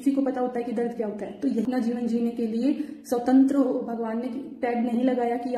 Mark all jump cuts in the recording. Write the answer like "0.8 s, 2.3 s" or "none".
1.7 s